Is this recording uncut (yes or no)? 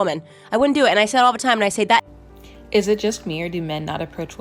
no